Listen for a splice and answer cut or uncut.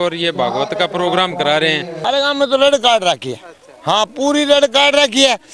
cut